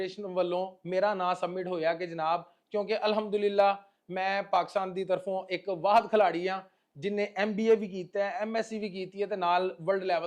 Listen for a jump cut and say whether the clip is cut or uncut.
uncut